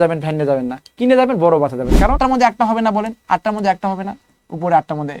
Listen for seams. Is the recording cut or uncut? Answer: cut